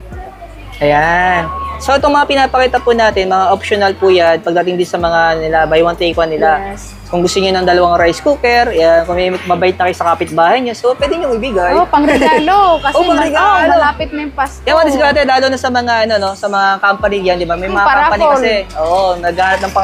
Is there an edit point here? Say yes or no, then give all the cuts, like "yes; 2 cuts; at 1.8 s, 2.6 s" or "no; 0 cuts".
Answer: no; 0 cuts